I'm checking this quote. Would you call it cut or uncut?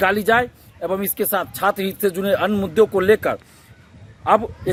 uncut